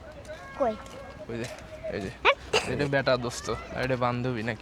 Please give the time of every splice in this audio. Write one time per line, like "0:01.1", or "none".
0:02.7
0:03.7